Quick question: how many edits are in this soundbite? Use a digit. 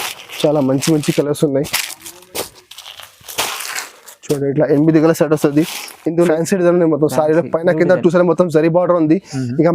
1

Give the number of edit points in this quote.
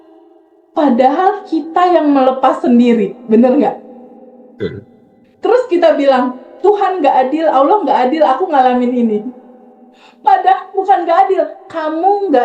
0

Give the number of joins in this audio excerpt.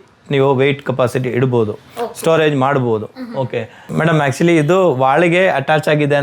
1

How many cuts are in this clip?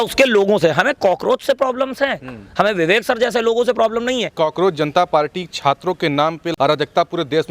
2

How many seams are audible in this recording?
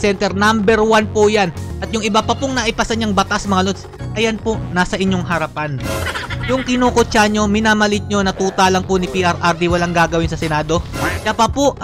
0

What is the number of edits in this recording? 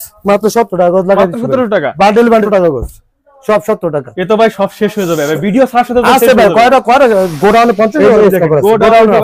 1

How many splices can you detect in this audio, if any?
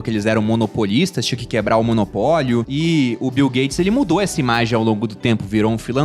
1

